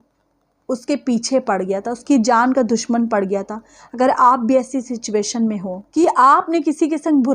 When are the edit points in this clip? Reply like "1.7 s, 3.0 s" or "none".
5.8 s